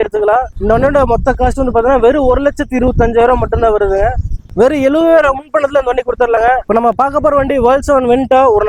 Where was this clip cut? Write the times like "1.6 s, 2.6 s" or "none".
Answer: 4.4 s, 6.6 s